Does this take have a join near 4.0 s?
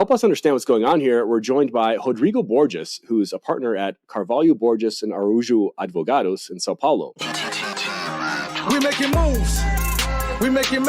no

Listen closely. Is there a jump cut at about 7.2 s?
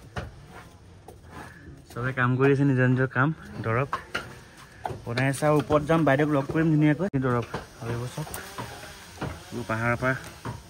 yes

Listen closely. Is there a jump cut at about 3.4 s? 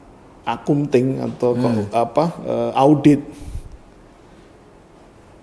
no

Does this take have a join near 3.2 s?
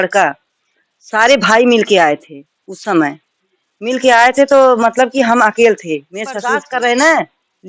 no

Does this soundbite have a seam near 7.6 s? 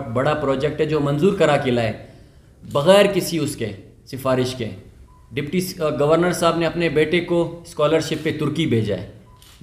no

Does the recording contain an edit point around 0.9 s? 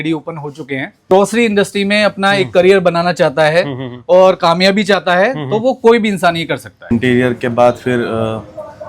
yes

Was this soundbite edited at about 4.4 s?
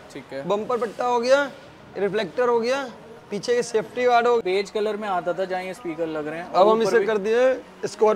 yes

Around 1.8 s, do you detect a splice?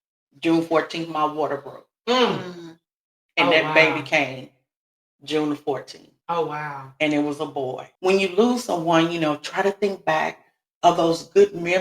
no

